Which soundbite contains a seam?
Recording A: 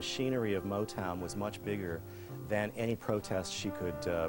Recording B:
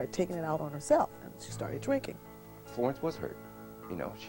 B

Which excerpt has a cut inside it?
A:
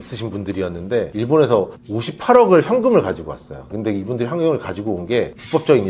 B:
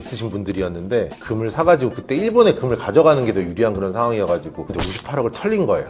B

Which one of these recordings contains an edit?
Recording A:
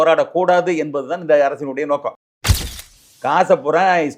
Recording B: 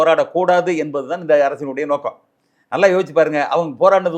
A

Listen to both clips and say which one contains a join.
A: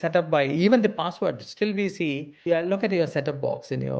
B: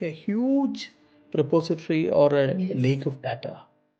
A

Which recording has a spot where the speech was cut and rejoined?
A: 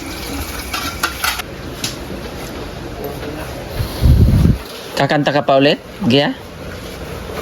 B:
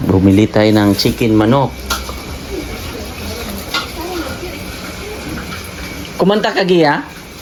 A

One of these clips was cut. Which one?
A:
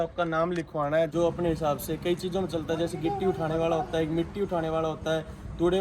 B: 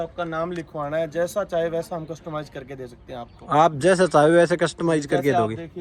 A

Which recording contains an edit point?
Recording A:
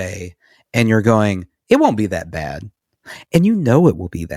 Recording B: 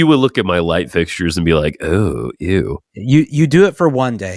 B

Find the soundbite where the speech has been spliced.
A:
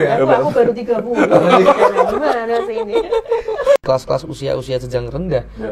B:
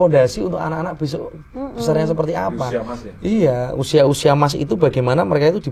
A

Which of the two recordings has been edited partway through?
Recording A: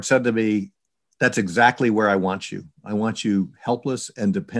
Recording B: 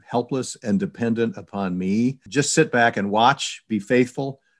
B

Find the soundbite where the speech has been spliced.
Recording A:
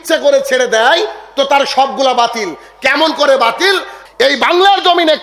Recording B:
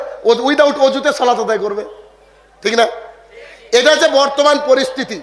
A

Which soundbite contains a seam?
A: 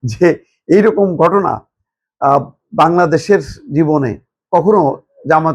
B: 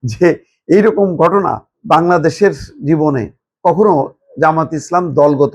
B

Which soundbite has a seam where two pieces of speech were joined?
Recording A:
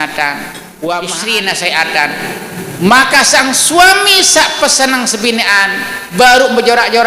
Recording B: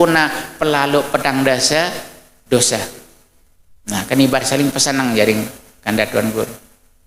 A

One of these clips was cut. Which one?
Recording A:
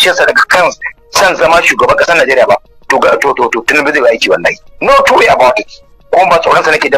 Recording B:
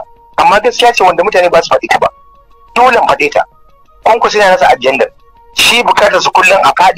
A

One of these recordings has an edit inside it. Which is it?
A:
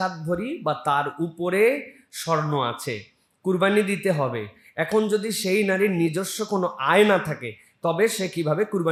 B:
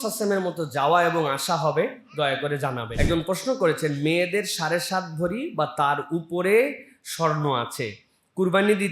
B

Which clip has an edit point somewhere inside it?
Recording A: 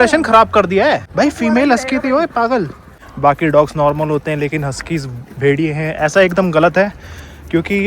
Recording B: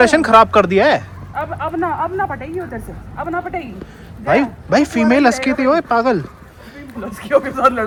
A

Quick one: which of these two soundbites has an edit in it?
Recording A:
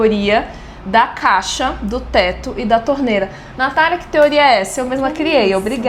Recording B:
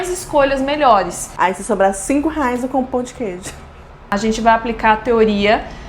B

